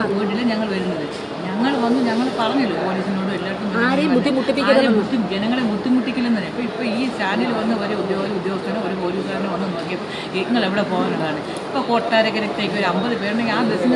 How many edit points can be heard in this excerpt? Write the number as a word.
zero